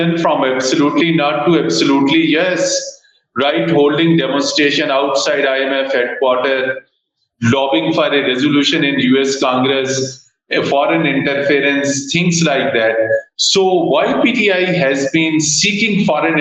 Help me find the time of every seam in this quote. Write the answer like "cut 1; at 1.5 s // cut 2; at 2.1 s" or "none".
none